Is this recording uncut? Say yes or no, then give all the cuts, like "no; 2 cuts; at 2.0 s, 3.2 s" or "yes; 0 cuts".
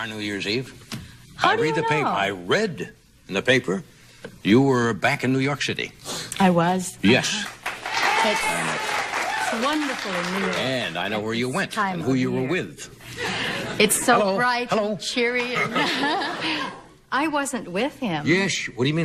yes; 0 cuts